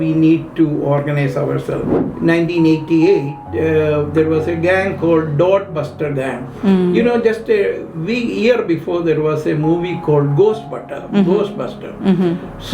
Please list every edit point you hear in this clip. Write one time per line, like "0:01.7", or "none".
0:01.9